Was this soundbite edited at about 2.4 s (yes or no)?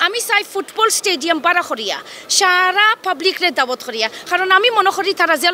no